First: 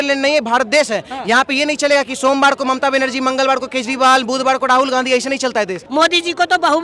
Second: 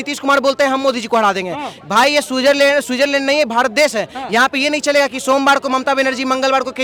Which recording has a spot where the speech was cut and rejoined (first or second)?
first